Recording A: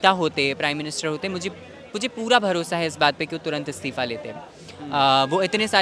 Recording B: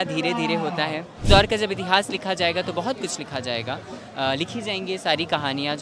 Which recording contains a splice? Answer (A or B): B